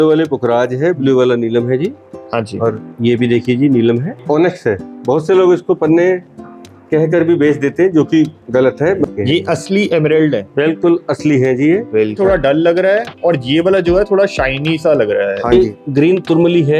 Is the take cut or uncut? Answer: cut